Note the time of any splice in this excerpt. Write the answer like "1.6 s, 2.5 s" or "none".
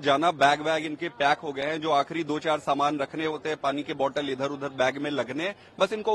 none

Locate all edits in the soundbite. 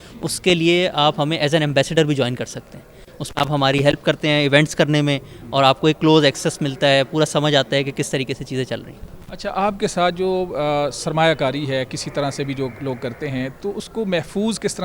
none

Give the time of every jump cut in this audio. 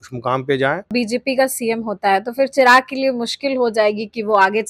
0.9 s

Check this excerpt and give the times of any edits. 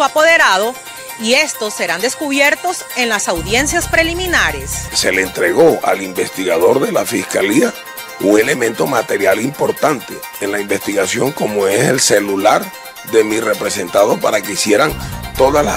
4.9 s

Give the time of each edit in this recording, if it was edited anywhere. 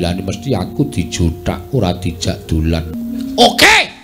2.9 s

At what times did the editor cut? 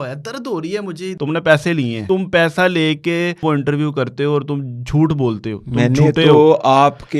1.1 s, 2.0 s, 3.4 s

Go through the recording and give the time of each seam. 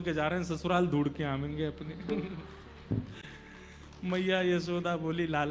none

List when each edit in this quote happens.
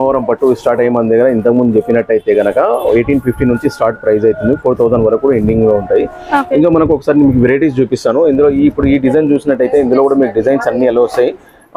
none

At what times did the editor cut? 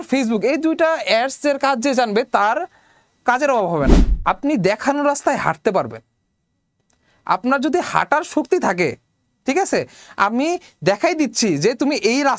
4.1 s

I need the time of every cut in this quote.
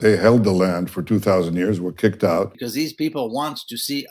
2.6 s

